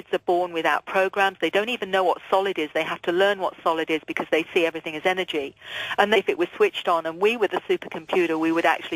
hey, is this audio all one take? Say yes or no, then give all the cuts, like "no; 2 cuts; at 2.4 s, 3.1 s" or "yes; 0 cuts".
yes; 0 cuts